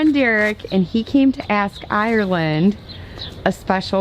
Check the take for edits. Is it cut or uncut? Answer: uncut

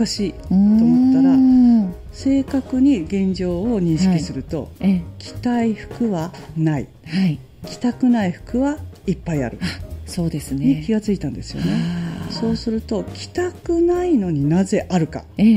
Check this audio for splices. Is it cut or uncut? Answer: uncut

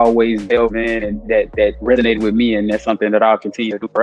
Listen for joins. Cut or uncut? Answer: uncut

